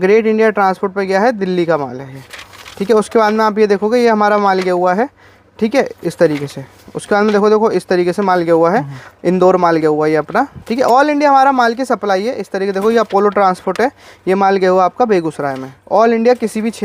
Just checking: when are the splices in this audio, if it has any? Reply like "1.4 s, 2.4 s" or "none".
none